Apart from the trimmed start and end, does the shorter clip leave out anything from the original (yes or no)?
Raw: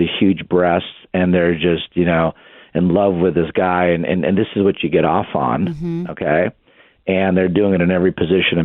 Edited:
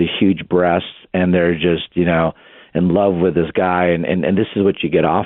no